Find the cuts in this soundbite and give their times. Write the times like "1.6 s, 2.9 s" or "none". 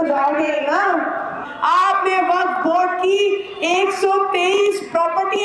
1.5 s